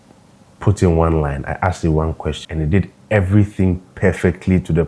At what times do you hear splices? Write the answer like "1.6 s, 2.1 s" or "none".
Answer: 2.4 s

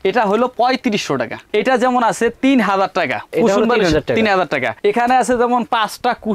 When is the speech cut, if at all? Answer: none

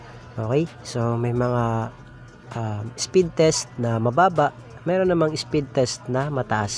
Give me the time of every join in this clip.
none

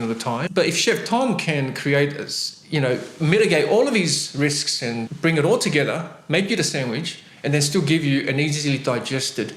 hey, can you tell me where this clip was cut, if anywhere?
none

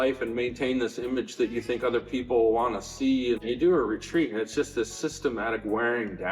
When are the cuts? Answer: 3.5 s

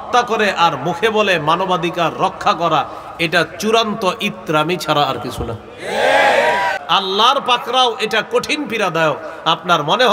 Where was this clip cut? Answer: 6.8 s

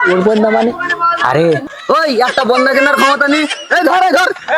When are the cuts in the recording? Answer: 1.7 s

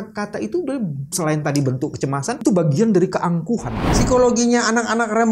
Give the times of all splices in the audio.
1.0 s, 2.4 s, 3.8 s

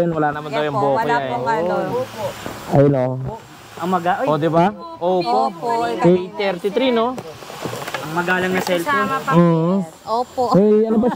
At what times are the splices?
none

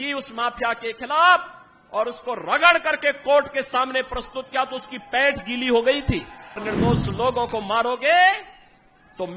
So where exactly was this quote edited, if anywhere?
6.6 s

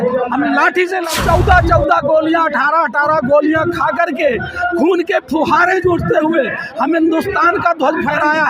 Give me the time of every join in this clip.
1.0 s

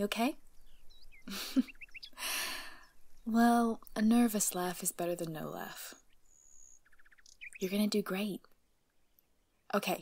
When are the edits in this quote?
4.9 s

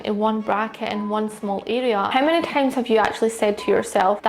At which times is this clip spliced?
2.1 s

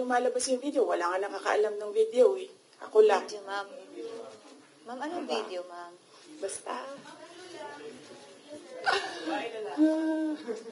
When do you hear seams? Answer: none

